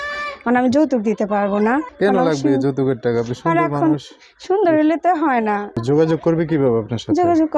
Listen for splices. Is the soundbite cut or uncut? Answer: cut